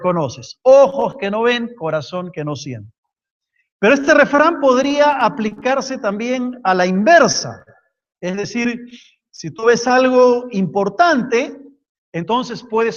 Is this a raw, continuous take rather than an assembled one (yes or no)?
yes